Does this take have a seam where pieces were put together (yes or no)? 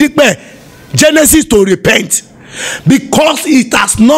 no